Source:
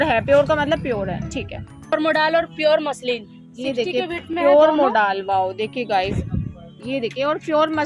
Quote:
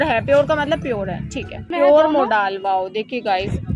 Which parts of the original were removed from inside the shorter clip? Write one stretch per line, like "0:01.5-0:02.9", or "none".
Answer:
0:01.6-0:04.2